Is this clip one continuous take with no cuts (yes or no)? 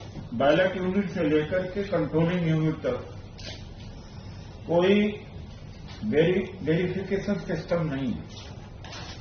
yes